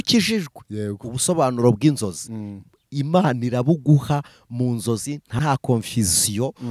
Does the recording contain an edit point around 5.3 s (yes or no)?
yes